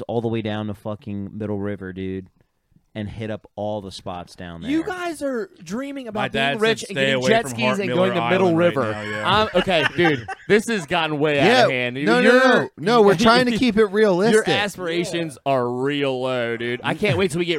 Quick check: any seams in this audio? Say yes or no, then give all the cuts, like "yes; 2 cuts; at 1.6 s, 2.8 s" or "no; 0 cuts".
no; 0 cuts